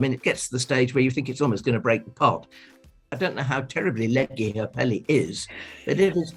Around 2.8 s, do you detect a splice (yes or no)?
yes